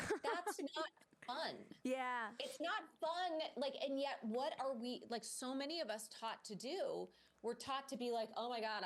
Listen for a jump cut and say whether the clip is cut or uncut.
uncut